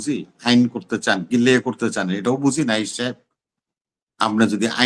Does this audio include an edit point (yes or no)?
no